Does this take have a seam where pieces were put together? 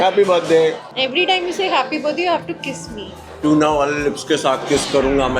yes; 2 cuts; at 0.9 s, 3.2 s

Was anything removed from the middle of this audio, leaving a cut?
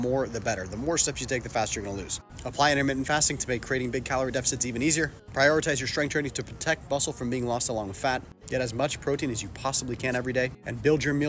yes; 4 cuts; at 2.1 s, 5.2 s, 8.3 s, 10.3 s

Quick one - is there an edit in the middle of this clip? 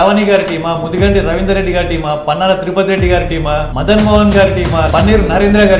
yes; 2 cuts; at 3.7 s, 4.9 s

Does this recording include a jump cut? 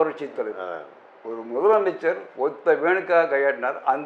no; 0 cuts

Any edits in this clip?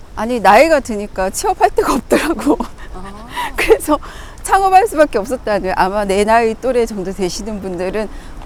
no; 0 cuts

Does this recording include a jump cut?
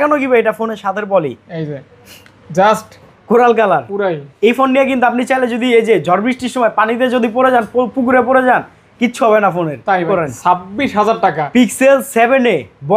yes; 2 cuts; at 3.1 s, 10.0 s

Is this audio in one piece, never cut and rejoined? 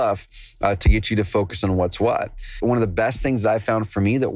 no; 1 cut; at 2.6 s

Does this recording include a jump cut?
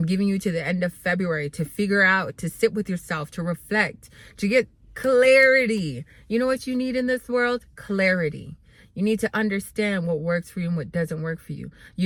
no; 0 cuts

